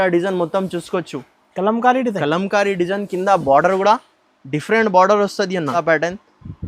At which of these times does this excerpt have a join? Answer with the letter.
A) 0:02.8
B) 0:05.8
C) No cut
B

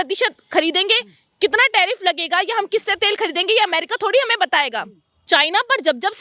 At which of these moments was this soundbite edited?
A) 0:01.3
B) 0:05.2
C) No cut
B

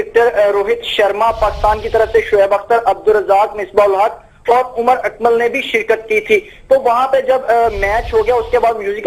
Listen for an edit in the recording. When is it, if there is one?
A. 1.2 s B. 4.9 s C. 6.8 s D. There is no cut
A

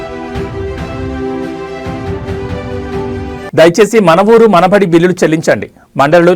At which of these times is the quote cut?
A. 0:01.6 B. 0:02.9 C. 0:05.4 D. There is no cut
D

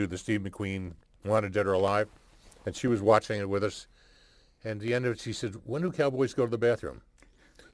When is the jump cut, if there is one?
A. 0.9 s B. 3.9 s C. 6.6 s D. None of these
B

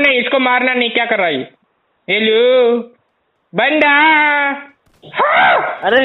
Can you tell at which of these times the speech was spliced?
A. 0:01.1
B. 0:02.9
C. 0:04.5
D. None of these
D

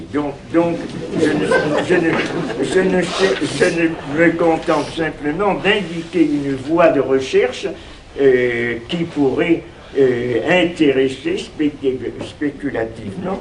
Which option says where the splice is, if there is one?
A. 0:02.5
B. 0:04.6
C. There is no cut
B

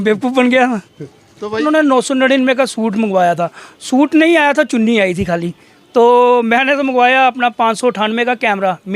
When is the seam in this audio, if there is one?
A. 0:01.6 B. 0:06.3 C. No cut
A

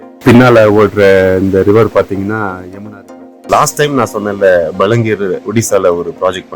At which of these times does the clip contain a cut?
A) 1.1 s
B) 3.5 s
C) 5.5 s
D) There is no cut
B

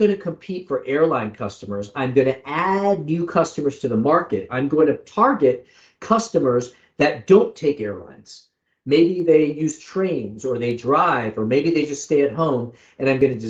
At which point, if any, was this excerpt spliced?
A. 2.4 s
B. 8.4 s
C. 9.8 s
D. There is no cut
D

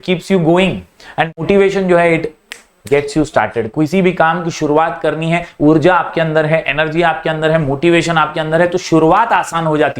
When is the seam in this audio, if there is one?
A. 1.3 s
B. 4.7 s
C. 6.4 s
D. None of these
A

